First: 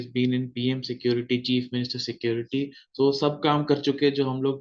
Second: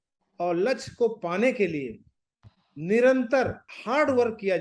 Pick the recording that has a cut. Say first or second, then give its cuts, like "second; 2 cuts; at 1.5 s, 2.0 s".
second; 1 cut; at 3.7 s